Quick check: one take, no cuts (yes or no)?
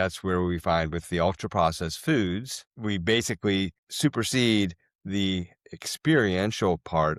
yes